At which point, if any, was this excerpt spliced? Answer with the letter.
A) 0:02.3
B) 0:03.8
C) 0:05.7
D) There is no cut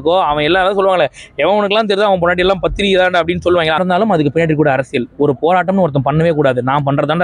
B